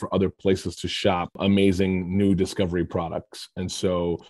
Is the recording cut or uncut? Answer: cut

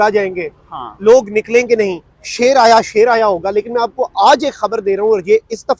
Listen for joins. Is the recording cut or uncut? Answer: uncut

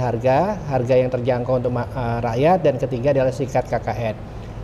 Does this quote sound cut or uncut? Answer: uncut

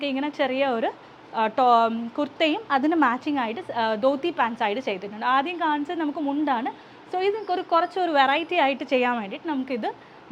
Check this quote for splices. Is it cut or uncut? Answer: uncut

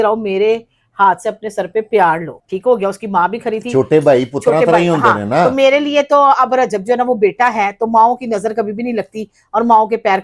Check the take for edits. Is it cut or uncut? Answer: uncut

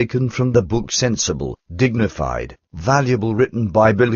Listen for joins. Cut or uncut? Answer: uncut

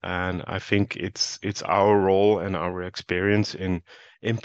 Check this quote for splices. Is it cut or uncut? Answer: uncut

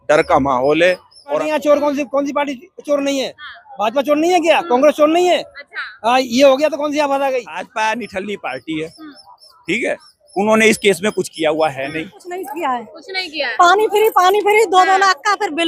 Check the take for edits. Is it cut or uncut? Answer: cut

